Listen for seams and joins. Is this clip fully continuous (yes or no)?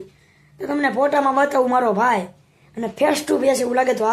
yes